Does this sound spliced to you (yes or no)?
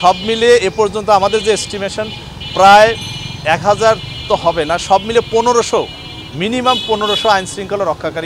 no